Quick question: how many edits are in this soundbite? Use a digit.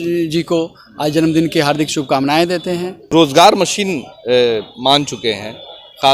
1